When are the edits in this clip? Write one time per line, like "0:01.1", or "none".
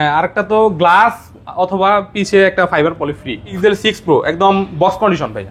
0:03.5

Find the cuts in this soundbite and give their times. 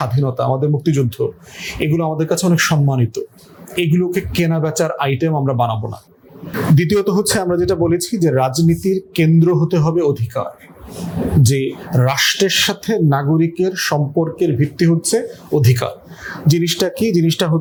none

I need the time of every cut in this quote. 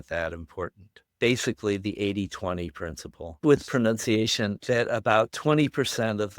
0:01.1
0:03.4
0:04.6

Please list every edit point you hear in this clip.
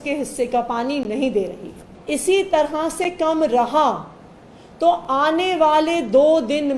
0:01.9

